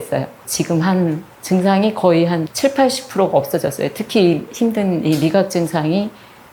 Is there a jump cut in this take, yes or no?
no